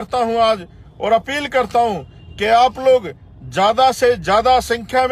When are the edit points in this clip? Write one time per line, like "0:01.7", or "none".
none